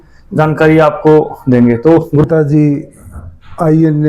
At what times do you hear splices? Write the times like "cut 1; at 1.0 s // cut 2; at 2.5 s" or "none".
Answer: cut 1; at 2.2 s

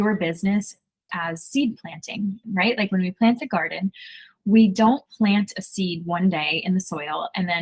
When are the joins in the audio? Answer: cut 1; at 0.9 s // cut 2; at 2.4 s

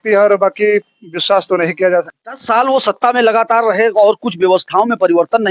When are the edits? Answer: cut 1; at 2.1 s

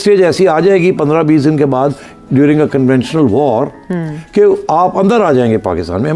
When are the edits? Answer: none

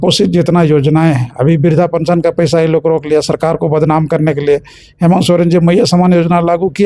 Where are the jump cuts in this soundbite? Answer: none

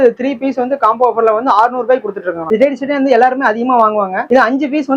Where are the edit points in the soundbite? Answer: cut 1; at 2.4 s

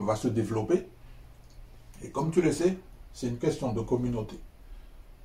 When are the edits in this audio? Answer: none

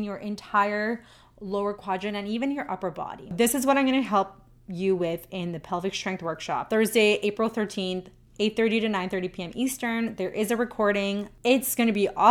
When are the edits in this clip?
cut 1; at 3.3 s // cut 2; at 6.6 s // cut 3; at 11.3 s

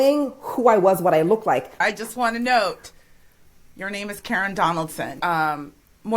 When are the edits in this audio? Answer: cut 1; at 1.8 s // cut 2; at 5.2 s

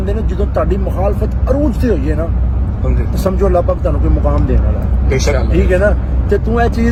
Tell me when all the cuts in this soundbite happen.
none

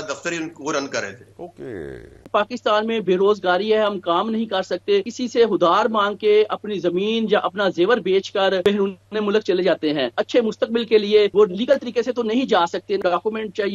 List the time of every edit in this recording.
cut 1; at 2.2 s // cut 2; at 5.2 s // cut 3; at 8.6 s // cut 4; at 10.2 s // cut 5; at 11.3 s // cut 6; at 13.0 s

